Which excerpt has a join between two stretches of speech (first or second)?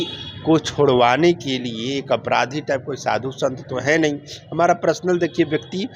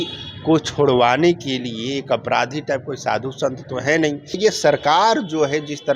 second